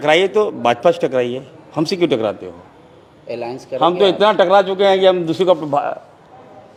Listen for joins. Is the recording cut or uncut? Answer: uncut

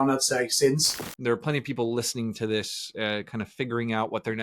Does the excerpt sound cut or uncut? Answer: cut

